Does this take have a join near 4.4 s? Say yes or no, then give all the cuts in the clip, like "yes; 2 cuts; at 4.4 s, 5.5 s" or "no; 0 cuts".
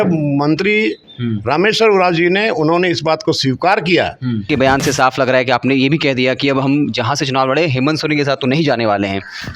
yes; 1 cut; at 4.4 s